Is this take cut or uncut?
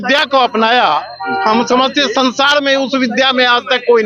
uncut